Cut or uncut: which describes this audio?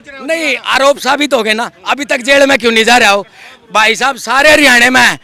uncut